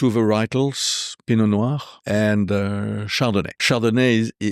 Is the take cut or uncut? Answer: cut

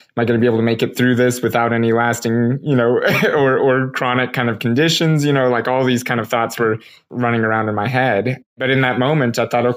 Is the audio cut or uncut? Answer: cut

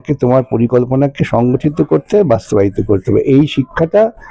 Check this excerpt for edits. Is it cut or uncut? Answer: uncut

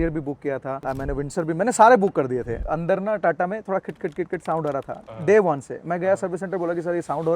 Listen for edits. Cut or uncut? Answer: cut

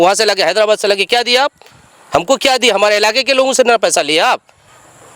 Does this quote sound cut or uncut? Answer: uncut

